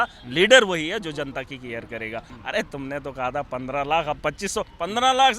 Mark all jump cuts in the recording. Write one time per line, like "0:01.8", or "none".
0:02.3